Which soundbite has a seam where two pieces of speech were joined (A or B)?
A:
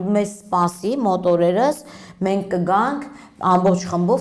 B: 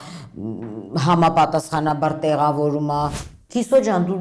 B